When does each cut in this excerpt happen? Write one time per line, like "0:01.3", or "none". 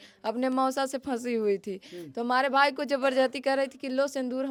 none